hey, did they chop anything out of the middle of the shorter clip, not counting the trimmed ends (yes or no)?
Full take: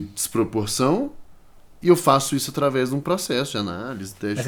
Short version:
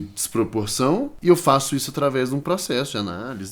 yes